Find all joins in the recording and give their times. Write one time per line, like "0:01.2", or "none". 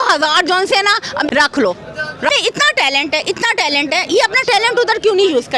0:01.3
0:02.3